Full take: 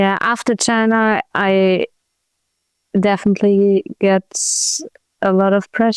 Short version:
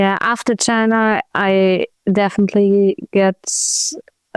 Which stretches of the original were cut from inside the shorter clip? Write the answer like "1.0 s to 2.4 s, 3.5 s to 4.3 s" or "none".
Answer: 1.9 s to 2.8 s